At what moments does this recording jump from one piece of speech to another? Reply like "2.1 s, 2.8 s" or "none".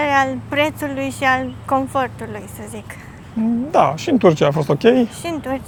none